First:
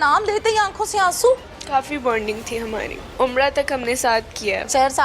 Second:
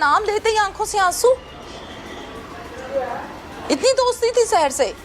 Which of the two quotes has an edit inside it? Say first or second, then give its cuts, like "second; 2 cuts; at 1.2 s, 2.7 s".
first; 2 cuts; at 1.5 s, 3.0 s